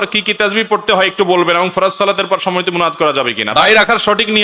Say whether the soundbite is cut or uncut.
cut